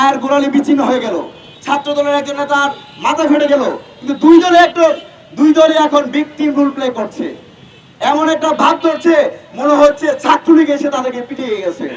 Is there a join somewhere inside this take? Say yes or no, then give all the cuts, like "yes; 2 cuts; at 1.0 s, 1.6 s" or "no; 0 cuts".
no; 0 cuts